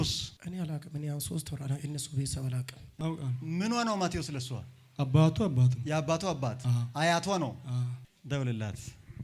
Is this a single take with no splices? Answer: no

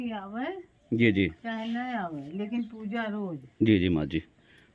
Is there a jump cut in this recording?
no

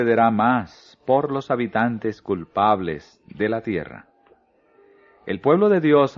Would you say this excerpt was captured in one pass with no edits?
no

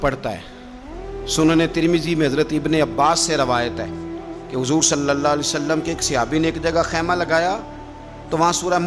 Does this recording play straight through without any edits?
yes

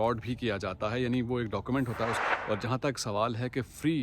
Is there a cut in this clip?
yes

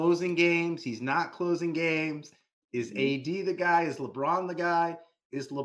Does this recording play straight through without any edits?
yes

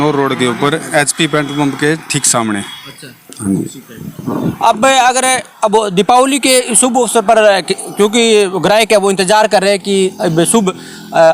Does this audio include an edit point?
no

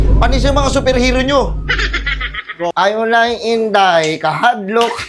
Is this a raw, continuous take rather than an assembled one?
no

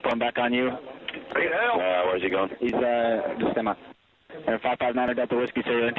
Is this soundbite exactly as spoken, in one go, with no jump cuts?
yes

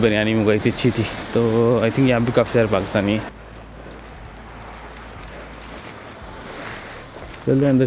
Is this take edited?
yes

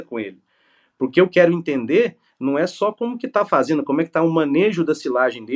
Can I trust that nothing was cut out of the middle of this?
yes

